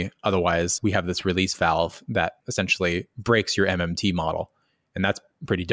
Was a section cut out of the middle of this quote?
yes; 1 cut; at 2.4 s

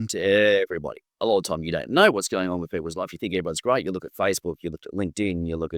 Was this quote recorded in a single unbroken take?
yes; 0 cuts

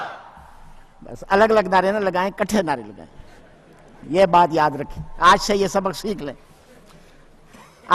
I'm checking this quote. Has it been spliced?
yes; 1 cut; at 2.7 s

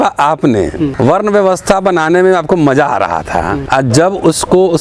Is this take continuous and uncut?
no; 2 cuts; at 0.9 s, 3.6 s

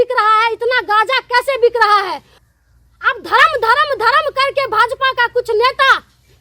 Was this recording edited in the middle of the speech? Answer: yes; 1 cut; at 2.4 s

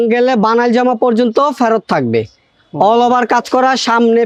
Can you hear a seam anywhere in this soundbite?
no; 0 cuts

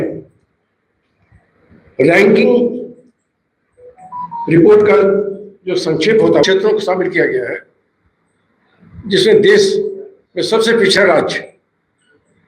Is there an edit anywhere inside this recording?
yes; 1 cut; at 6.4 s

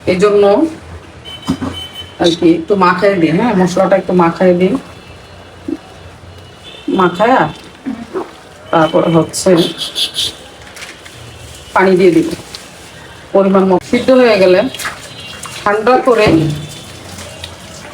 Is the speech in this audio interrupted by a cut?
yes; 1 cut; at 13.8 s

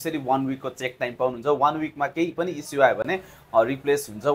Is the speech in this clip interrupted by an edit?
no; 0 cuts

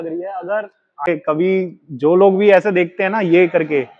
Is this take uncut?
no; 1 cut; at 1.1 s

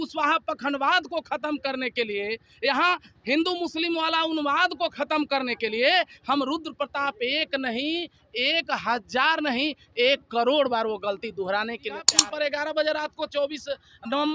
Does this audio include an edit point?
yes; 1 cut; at 12.1 s

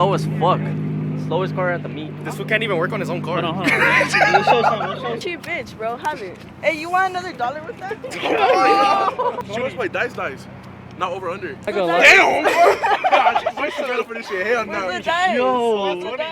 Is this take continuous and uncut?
no; 3 cuts; at 5.2 s, 9.4 s, 11.7 s

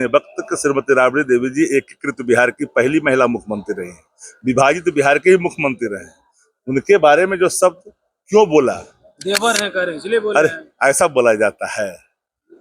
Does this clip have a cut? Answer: no; 0 cuts

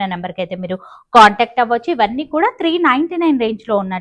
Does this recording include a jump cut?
no; 0 cuts

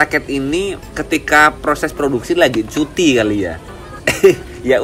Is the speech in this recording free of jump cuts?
yes; 0 cuts

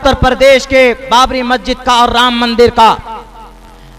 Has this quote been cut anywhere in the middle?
no; 0 cuts

